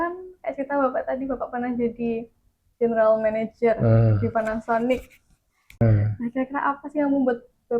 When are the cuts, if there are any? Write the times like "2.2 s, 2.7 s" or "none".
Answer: 5.8 s